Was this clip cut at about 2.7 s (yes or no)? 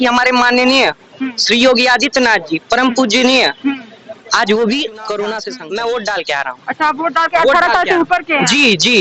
no